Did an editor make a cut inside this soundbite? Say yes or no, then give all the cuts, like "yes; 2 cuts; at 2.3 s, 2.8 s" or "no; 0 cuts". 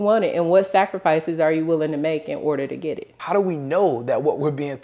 yes; 1 cut; at 3.1 s